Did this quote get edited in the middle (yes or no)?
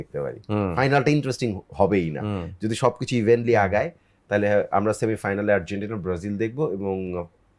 no